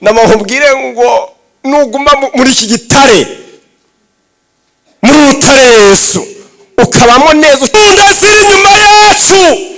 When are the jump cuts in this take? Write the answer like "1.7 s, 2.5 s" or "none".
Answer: 7.7 s